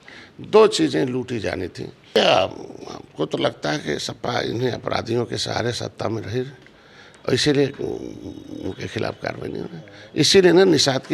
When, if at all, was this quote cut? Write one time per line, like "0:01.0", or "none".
0:02.2